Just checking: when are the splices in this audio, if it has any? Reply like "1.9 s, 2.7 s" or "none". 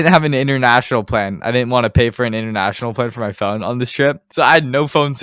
4.2 s